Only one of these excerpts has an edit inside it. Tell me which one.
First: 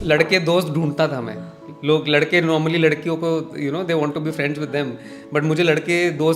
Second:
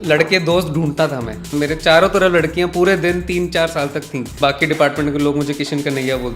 second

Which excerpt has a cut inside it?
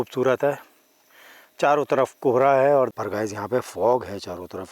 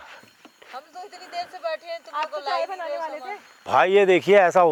first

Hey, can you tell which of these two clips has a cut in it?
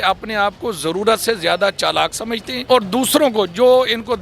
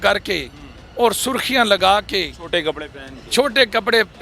first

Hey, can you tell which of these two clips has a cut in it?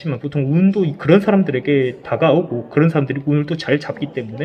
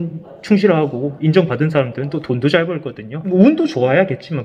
second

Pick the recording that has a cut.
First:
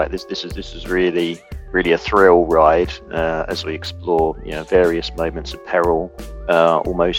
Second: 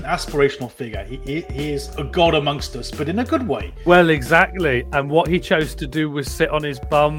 second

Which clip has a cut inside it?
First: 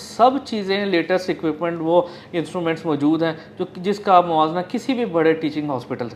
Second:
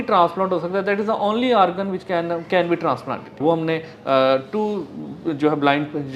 second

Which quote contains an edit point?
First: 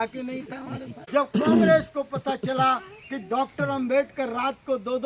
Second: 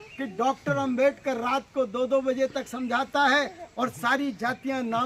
first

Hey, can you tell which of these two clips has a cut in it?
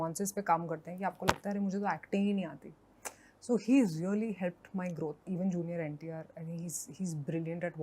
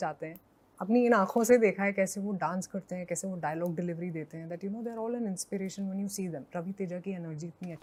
first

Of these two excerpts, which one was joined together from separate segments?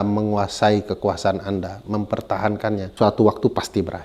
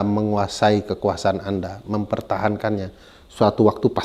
first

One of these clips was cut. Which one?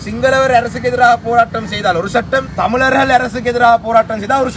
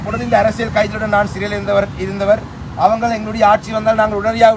first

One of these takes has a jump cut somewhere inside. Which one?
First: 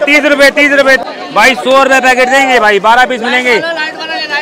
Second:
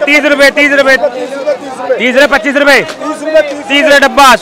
first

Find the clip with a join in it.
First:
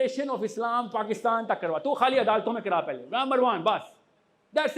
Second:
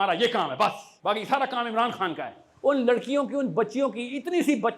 second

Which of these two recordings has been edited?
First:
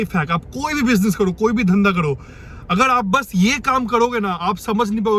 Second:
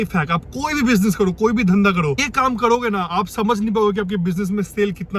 second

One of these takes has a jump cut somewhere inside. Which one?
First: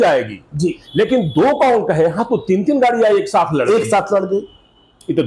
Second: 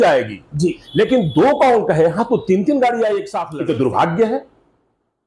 second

